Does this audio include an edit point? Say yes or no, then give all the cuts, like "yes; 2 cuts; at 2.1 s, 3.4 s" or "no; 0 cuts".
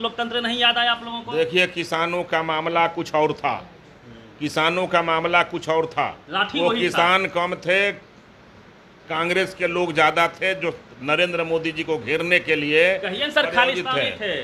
no; 0 cuts